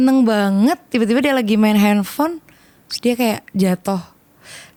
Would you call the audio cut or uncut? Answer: uncut